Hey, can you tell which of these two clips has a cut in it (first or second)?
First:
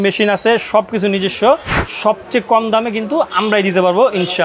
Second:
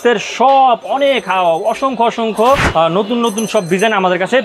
second